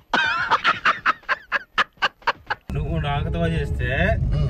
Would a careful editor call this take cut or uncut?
cut